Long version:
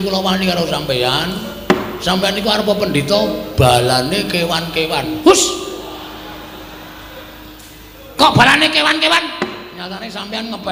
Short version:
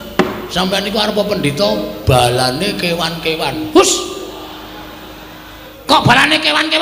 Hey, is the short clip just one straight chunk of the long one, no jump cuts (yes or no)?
no